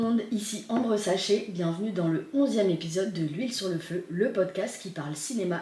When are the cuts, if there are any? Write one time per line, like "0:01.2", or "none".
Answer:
none

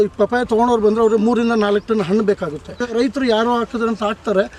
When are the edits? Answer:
0:02.9

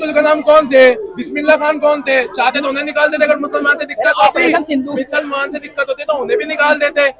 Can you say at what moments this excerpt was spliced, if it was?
none

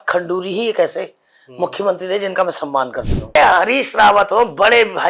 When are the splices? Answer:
0:03.4

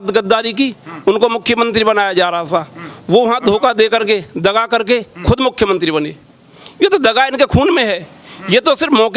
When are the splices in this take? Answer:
none

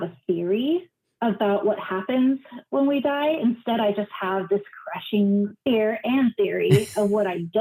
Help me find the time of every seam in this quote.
none

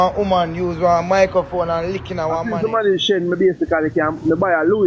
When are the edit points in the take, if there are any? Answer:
0:02.4

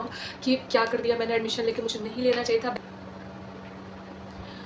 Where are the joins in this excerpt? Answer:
0:02.8

